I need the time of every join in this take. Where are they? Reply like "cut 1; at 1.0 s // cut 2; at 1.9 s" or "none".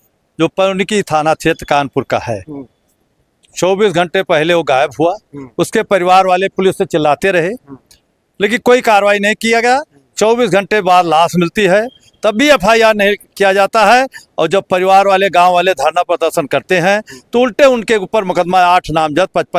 none